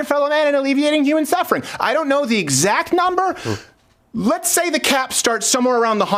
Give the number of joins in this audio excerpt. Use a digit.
0